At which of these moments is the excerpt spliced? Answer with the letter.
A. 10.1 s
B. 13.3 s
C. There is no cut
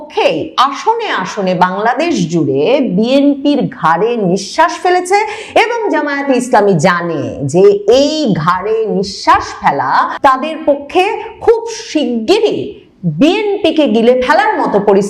A